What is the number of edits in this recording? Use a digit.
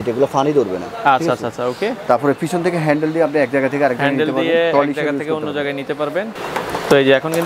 1